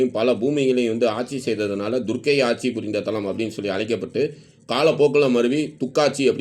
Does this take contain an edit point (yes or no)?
no